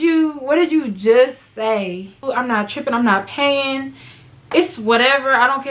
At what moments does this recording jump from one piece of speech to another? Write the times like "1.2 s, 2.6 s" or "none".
2.2 s